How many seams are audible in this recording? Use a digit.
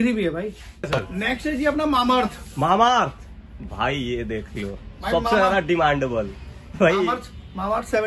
1